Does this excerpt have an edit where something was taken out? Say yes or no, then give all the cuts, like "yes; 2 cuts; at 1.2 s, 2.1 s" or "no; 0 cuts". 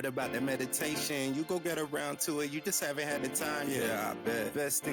no; 0 cuts